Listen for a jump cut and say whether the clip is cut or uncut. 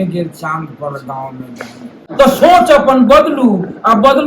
cut